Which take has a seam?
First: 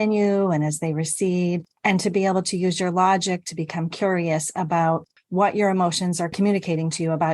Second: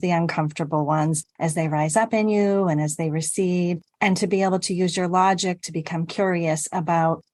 first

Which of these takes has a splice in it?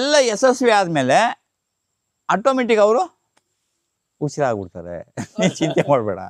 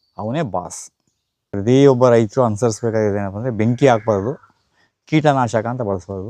second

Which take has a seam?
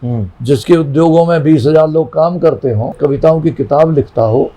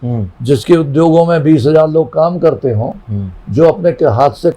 first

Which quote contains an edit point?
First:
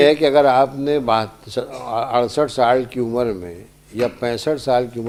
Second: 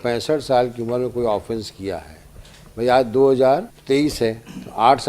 second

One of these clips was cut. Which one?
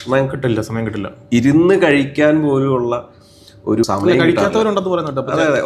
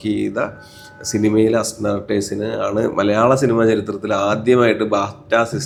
first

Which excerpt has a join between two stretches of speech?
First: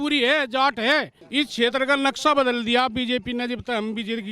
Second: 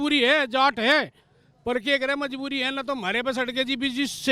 first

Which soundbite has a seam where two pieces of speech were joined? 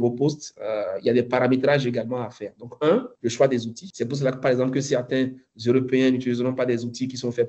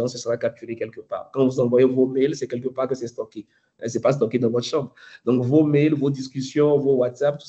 first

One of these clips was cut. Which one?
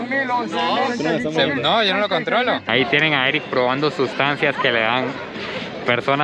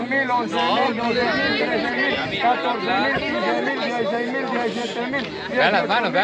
first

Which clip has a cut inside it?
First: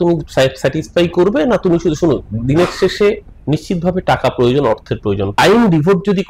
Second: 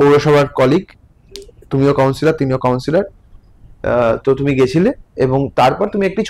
first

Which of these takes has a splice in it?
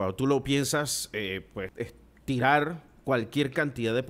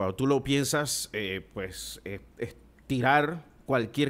first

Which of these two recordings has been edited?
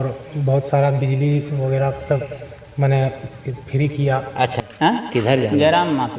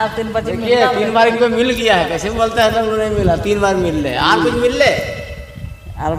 first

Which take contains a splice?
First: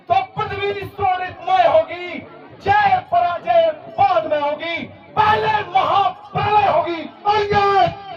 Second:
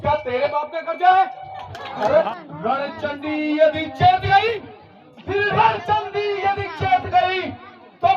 second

